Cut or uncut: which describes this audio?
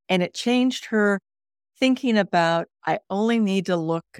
uncut